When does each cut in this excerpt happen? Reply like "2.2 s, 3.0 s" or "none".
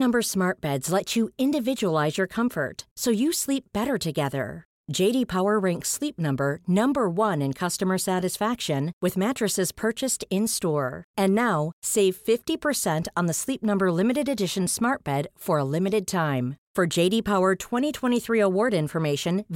none

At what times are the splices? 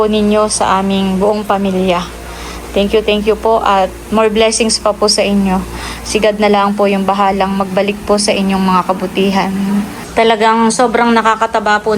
10.0 s

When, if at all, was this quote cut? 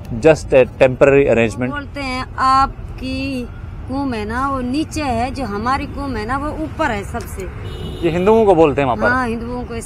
1.9 s

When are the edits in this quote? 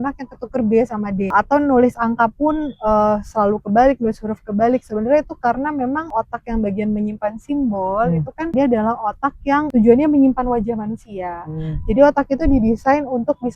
1.3 s, 6.1 s, 8.5 s, 9.7 s

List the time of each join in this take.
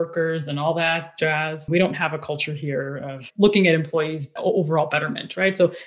1.6 s, 4.4 s

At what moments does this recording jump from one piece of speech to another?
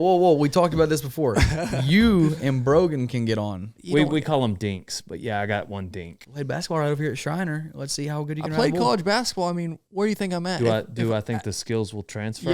3.8 s, 6.1 s, 9.8 s

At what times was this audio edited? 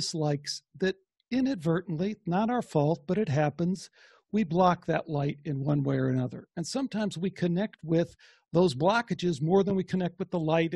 1.1 s

